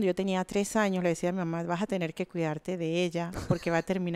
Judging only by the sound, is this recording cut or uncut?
uncut